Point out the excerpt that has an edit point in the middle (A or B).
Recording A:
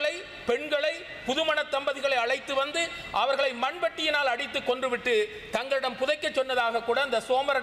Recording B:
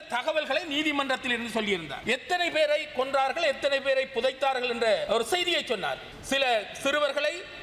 B